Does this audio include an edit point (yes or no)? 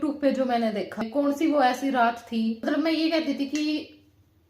yes